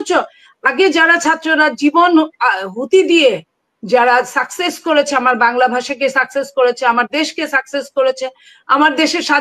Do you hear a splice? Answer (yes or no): no